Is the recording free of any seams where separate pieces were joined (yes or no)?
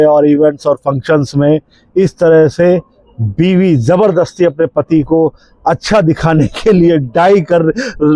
yes